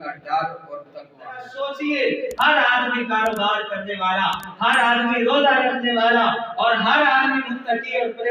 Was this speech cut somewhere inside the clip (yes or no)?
yes